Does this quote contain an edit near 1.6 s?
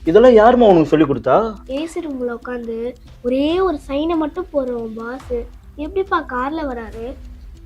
yes; 1 cut; at 1.6 s

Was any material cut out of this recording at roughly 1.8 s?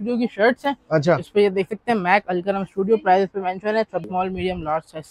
no; 1 cut; at 4.1 s

